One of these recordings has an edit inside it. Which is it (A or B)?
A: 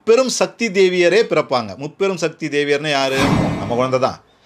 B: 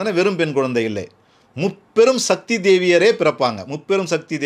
A